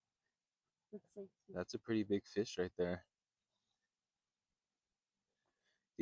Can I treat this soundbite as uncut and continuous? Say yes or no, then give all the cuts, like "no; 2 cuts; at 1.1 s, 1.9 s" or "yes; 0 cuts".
yes; 0 cuts